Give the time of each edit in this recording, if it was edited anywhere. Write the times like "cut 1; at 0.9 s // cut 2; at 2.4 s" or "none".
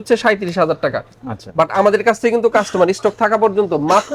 none